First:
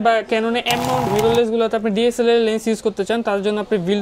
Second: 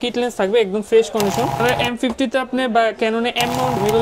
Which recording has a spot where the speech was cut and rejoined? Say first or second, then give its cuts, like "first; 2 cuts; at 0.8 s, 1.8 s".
second; 1 cut; at 1.6 s